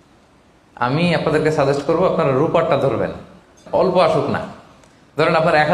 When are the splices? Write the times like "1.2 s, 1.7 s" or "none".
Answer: 3.6 s